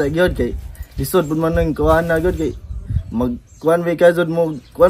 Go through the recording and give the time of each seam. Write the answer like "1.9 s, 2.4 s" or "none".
none

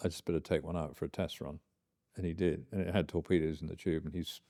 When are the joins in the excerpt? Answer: none

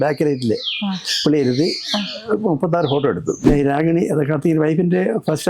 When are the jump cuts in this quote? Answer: 3.4 s

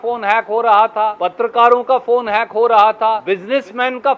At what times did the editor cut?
1.2 s, 3.2 s

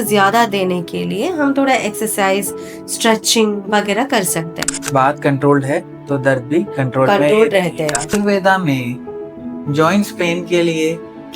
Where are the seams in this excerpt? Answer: 4.8 s, 8.1 s

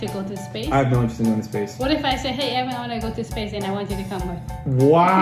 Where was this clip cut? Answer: none

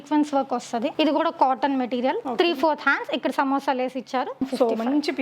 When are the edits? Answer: 0.9 s, 2.2 s, 4.4 s

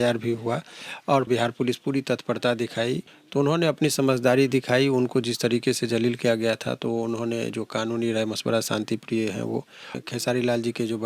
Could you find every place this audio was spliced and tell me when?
1.3 s, 3.1 s, 10.0 s

